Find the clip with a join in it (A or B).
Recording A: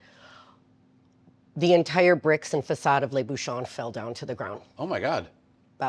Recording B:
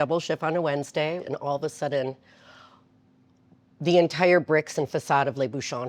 B